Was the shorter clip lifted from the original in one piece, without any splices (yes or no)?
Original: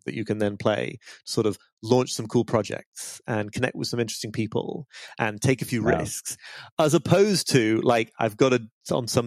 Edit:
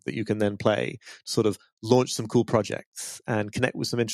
yes